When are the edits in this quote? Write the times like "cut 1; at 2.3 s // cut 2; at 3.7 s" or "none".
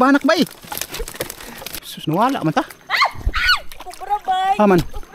cut 1; at 1.7 s